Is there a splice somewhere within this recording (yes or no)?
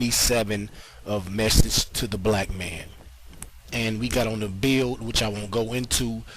yes